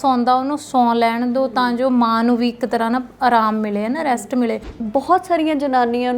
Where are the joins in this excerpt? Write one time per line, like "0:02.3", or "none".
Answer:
0:04.7